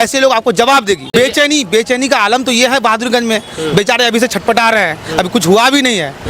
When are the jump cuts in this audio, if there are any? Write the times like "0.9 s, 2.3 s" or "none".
1.1 s